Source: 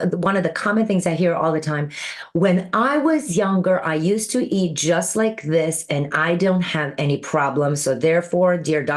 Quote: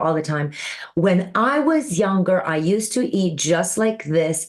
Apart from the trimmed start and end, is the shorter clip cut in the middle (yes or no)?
no